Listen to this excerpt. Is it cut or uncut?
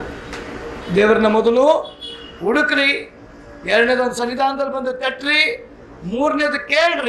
uncut